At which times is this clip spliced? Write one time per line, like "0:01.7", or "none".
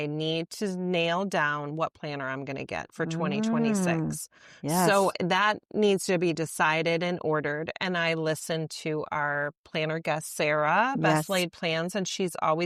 none

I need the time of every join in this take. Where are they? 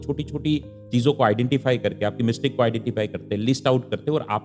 none

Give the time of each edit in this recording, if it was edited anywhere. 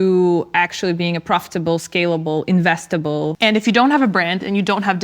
0:03.4

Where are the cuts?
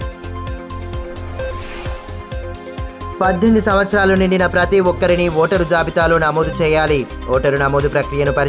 none

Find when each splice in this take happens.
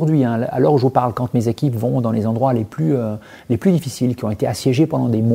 none

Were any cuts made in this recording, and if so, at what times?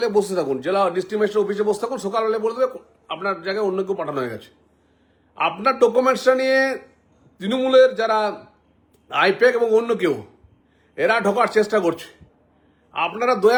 none

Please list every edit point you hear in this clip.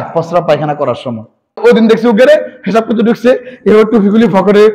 0:01.6

